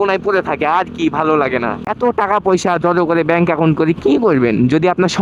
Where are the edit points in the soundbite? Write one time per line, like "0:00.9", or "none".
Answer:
0:01.8